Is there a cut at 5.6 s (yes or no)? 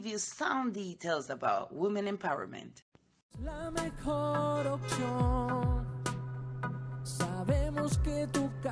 no